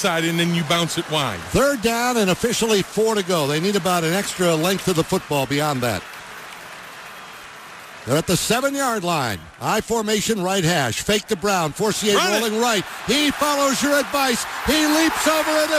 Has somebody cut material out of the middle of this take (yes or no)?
no